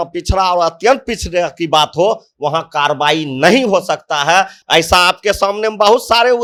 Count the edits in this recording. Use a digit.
0